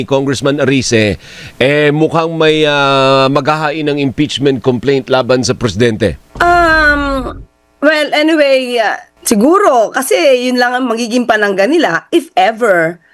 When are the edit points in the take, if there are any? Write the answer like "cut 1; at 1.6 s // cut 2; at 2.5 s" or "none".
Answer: cut 1; at 6.2 s // cut 2; at 9.1 s